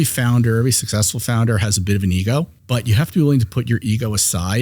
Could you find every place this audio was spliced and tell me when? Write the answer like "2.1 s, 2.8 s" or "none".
2.6 s